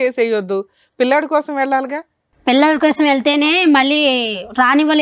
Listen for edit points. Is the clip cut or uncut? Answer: uncut